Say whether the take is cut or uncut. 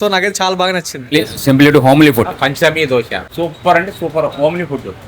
cut